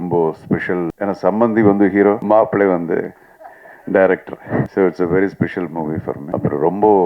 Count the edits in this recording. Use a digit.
4